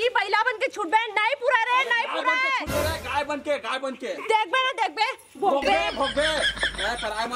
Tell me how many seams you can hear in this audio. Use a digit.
0